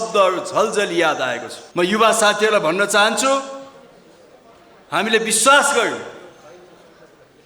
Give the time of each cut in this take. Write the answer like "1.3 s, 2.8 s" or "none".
none